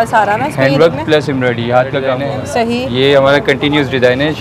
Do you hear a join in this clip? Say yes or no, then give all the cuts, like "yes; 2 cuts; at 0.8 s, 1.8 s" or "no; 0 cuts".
yes; 1 cut; at 2.2 s